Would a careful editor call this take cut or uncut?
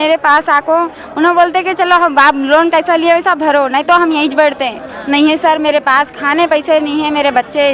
uncut